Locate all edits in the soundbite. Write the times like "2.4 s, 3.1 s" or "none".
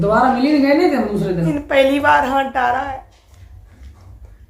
1.5 s